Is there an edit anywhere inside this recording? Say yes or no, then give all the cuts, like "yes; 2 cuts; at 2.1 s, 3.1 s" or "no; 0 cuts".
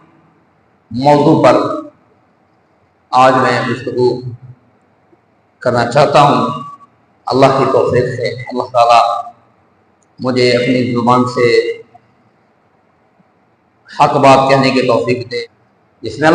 yes; 1 cut; at 15.3 s